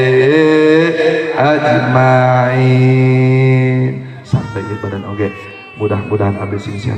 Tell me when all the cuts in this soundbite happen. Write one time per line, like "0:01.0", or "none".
0:04.2